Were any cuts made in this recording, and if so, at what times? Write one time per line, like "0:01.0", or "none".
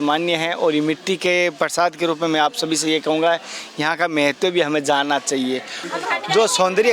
0:05.8